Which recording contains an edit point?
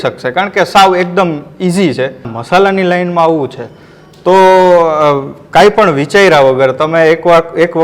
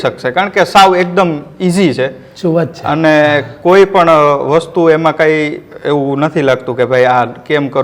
first; 1 cut; at 2.3 s

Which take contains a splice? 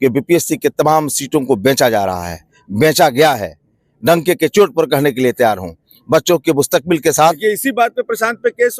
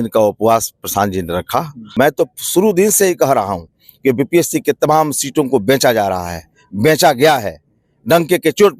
second; 1 cut; at 1.8 s

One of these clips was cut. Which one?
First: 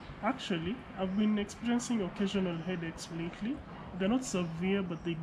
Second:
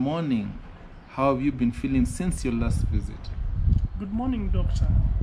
second; 1 cut; at 3.9 s

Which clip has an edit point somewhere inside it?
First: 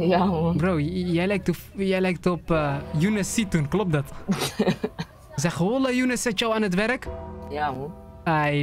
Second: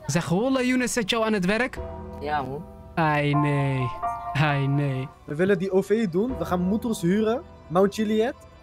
second; 1 cut; at 5.0 s

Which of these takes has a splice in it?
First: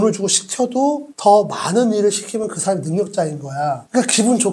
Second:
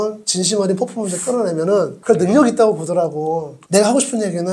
second; 1 cut; at 3.6 s

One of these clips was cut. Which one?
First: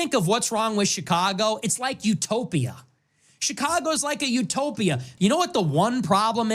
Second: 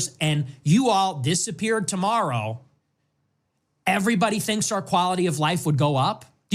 first; 1 cut; at 5.1 s

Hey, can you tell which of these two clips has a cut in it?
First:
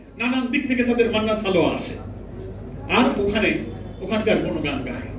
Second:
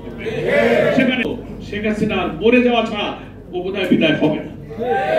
second; 1 cut; at 1.2 s

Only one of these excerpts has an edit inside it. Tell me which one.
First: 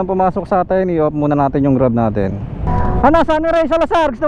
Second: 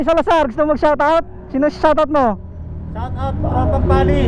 first; 1 cut; at 2.6 s

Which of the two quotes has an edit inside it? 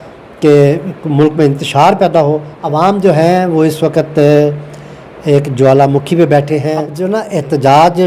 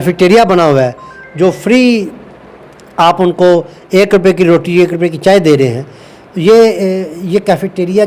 first; 2 cuts; at 2.5 s, 6.9 s

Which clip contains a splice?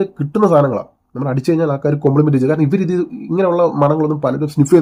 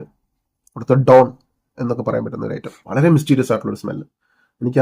second; 1 cut; at 2.7 s

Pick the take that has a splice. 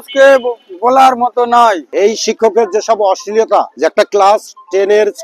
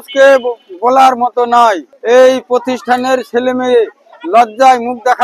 first; 2 cuts; at 1.9 s, 3.7 s

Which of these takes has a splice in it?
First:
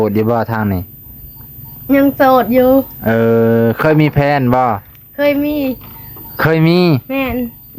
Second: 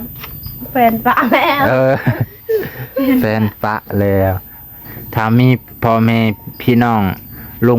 second; 1 cut; at 4.8 s

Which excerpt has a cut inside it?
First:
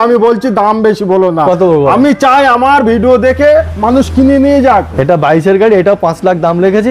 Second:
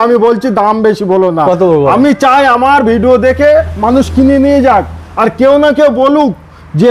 first; 1 cut; at 4.9 s

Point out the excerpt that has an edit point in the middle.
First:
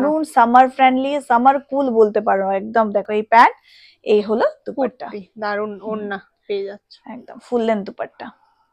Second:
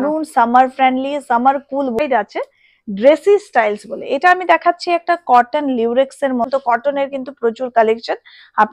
second; 2 cuts; at 2.0 s, 6.5 s

